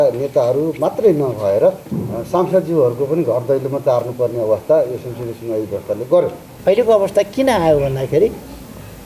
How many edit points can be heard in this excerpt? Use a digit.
1